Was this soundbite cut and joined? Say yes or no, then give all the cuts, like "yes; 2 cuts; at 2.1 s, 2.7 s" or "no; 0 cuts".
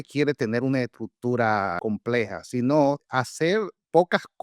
yes; 2 cuts; at 1.8 s, 3.1 s